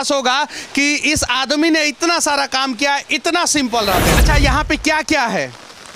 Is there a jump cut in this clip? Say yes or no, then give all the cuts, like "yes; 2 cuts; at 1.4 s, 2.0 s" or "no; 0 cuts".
yes; 1 cut; at 4.2 s